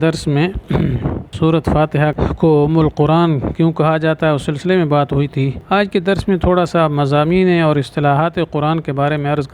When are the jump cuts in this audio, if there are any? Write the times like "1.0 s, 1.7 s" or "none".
1.3 s, 2.2 s, 5.6 s